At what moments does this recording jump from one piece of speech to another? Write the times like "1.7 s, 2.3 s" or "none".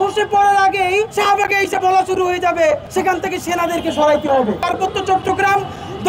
1.1 s, 2.9 s, 4.6 s